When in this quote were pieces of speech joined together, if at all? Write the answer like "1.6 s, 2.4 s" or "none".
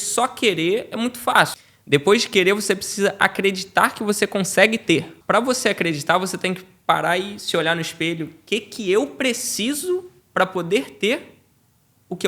1.7 s, 5.1 s